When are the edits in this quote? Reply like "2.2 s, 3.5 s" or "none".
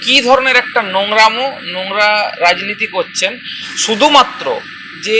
none